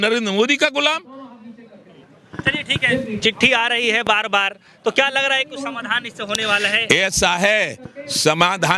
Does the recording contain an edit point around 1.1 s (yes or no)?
no